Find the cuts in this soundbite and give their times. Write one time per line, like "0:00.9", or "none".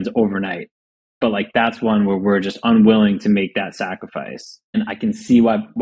0:04.8